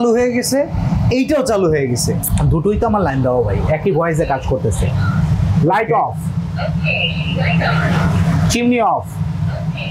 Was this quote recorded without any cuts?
yes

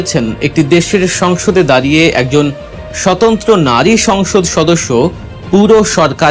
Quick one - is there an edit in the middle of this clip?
no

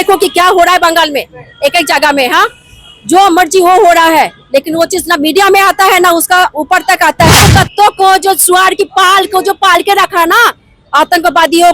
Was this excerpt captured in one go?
no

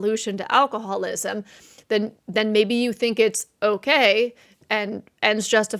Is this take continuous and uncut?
yes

